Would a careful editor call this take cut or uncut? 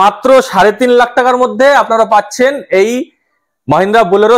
uncut